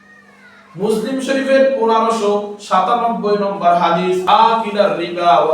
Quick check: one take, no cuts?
no; 1 cut; at 4.2 s

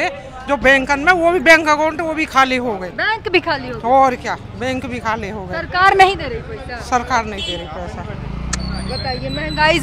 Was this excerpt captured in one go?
yes; 0 cuts

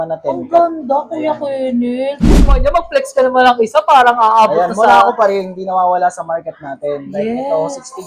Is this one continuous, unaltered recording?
no; 1 cut; at 2.5 s

